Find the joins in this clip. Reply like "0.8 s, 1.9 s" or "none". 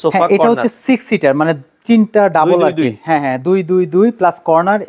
none